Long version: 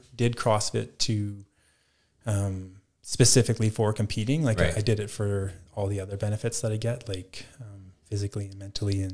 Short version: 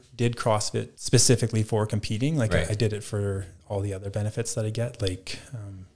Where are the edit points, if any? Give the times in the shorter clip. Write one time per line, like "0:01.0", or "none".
0:01.0